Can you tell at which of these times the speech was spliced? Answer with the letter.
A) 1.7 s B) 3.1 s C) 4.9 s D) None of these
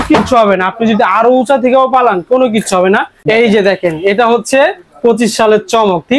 B